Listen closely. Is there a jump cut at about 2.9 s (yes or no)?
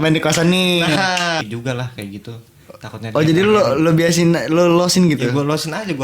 no